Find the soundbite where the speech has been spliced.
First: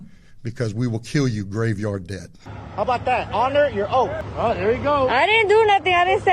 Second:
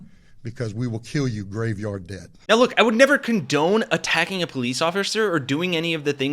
first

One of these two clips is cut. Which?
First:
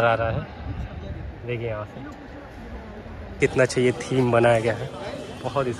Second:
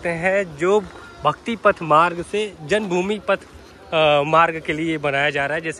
first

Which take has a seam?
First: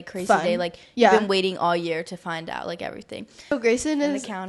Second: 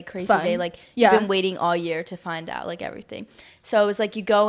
first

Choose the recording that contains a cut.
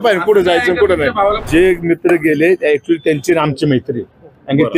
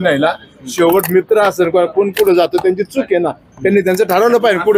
first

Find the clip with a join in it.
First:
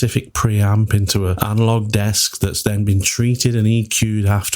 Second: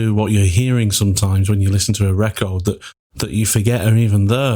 first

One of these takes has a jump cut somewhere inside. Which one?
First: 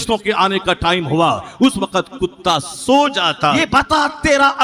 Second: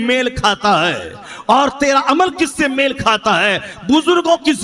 first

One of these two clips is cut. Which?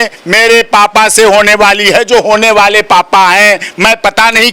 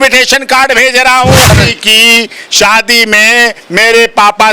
second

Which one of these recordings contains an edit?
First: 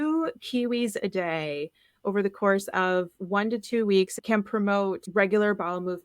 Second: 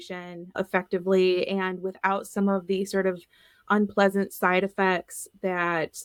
first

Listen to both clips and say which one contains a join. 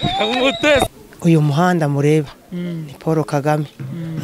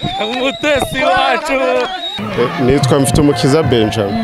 first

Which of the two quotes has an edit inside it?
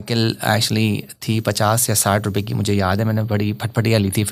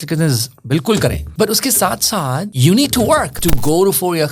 second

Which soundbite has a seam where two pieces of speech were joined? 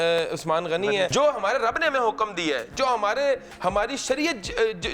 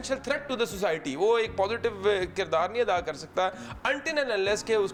first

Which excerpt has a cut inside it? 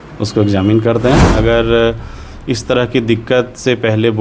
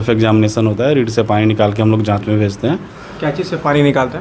first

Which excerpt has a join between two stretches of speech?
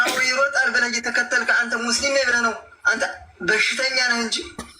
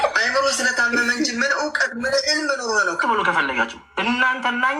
second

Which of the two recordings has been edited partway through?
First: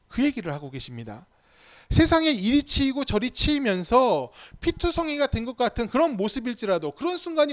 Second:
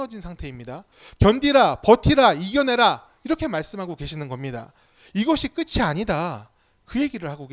second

